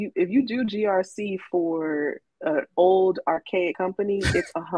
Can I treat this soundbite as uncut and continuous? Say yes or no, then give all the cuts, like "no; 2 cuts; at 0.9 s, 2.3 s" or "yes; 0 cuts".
yes; 0 cuts